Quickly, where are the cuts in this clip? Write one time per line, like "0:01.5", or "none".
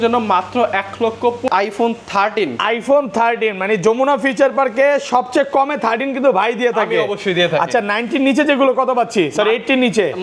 0:01.5